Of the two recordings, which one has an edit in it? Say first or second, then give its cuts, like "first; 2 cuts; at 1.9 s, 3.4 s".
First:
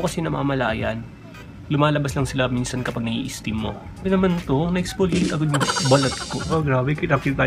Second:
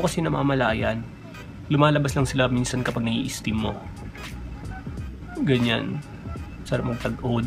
first; 2 cuts; at 4.0 s, 6.4 s